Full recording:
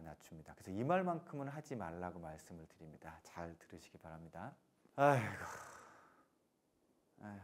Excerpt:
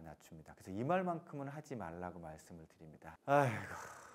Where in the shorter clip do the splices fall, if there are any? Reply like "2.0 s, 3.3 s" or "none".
3.1 s